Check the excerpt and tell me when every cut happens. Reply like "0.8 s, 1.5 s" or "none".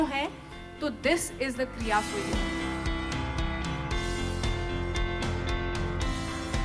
2.2 s